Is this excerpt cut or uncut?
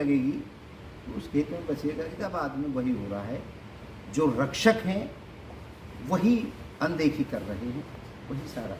cut